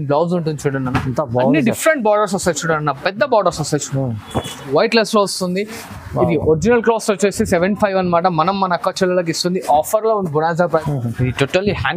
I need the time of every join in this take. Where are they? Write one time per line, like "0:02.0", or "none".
0:04.7
0:10.9